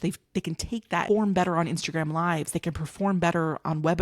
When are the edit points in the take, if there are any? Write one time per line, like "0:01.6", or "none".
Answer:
0:01.0